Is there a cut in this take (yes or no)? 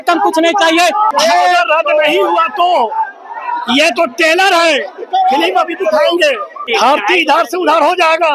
yes